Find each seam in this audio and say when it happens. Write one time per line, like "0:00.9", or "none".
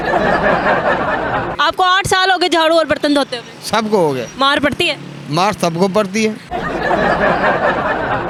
none